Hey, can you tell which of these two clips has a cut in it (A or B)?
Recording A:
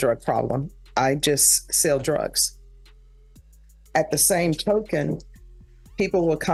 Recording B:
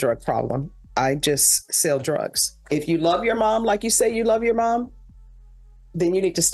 B